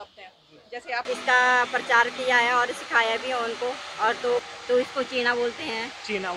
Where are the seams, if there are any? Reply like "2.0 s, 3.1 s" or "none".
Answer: 1.0 s, 4.4 s